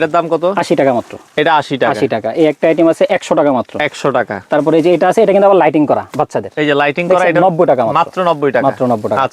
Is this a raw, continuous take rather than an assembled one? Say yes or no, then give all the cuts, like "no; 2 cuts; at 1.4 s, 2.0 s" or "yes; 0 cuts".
yes; 0 cuts